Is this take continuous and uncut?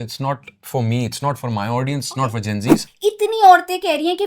no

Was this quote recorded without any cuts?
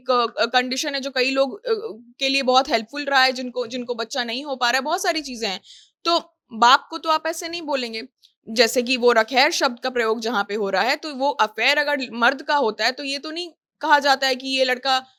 yes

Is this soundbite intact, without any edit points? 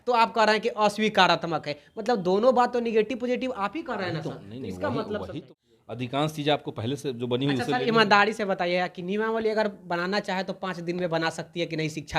no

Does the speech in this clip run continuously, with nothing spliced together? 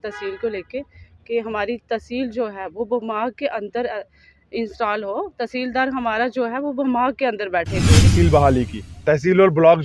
no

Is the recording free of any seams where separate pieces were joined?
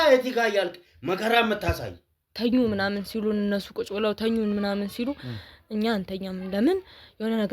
no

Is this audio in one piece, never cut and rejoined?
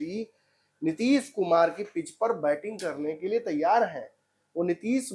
yes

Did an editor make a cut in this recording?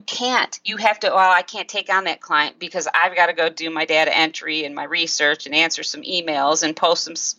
no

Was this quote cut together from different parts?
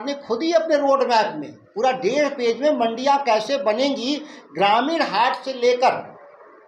no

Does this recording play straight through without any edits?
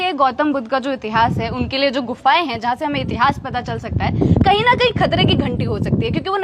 yes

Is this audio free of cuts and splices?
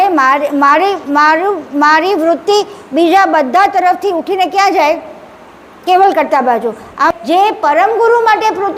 no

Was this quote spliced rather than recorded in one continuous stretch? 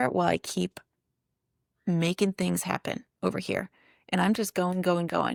no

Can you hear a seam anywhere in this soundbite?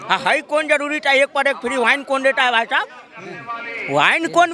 no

